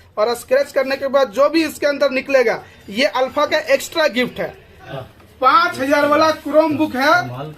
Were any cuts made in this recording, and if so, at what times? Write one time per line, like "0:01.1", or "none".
0:04.9

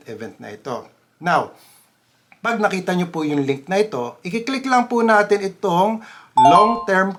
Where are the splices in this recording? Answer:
none

